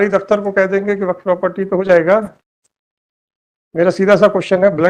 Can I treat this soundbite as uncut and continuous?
yes; 0 cuts

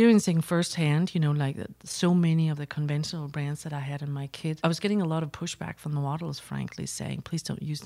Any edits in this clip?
yes; 1 cut; at 4.6 s

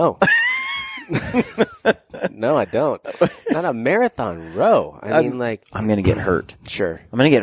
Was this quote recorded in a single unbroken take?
no; 1 cut; at 5.7 s

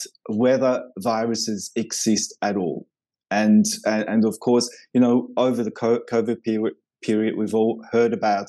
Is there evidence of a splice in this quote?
no; 0 cuts

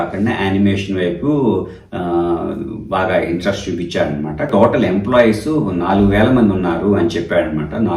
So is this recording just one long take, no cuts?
no; 1 cut; at 4.5 s

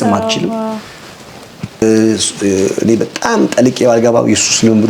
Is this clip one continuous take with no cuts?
no; 1 cut; at 1.8 s

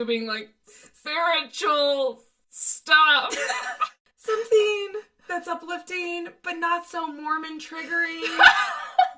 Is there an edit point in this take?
yes; 1 cut; at 3.7 s

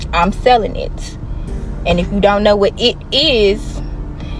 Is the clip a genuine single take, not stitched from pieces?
yes; 0 cuts

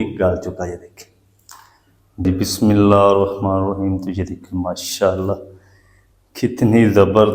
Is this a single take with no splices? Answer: no; 1 cut; at 2.2 s

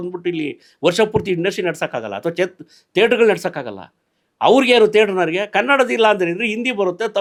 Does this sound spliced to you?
no; 0 cuts

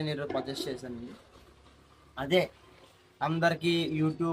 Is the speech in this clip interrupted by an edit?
no; 0 cuts

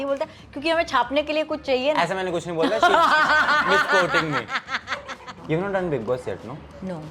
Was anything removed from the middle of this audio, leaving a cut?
yes; 1 cut; at 5.3 s

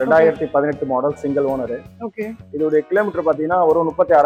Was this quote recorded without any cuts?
yes; 0 cuts

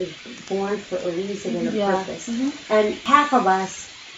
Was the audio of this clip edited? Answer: yes; 1 cut; at 3.0 s

